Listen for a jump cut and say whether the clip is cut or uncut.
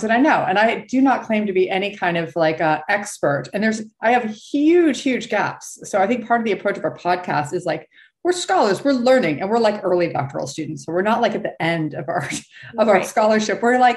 uncut